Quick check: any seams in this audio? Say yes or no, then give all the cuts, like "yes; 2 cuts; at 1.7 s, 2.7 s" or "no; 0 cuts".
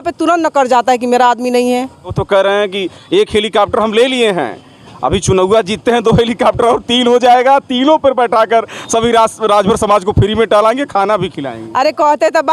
yes; 1 cut; at 2.2 s